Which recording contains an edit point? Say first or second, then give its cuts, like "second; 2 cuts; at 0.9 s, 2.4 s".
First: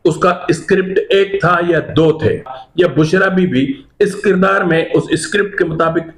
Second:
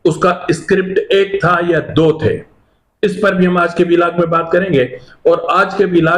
first; 1 cut; at 2.6 s